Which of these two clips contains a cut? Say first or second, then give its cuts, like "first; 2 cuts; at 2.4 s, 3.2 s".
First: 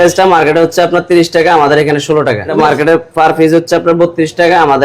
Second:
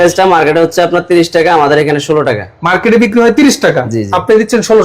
first; 1 cut; at 2.5 s